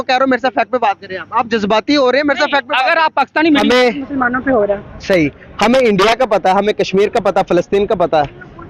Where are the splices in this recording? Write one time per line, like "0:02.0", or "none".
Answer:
0:03.6